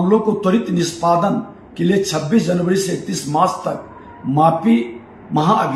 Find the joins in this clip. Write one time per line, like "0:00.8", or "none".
none